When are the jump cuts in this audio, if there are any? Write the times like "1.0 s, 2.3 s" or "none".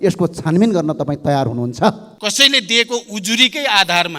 2.1 s